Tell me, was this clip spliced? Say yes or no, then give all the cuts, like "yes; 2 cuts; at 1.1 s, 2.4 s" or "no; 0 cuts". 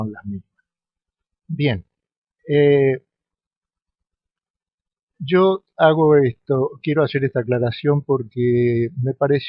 yes; 1 cut; at 6.5 s